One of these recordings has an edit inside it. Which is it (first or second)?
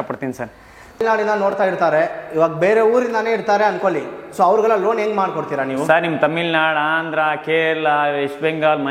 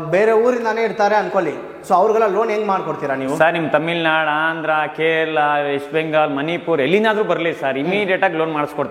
first